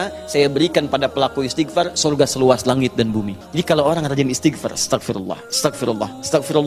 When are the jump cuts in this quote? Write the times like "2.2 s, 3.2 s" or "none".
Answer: 3.4 s

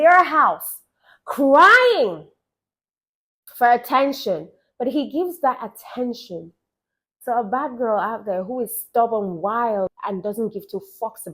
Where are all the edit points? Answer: 9.9 s

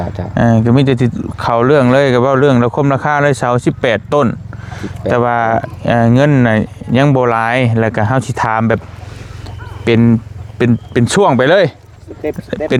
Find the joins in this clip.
none

